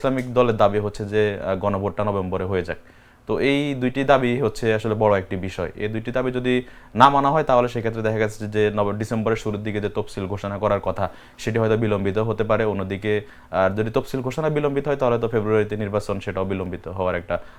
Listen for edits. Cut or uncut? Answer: uncut